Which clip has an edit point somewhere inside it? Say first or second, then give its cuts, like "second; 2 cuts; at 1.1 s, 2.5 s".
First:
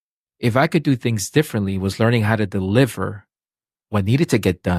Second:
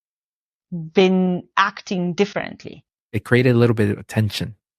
second; 1 cut; at 3.1 s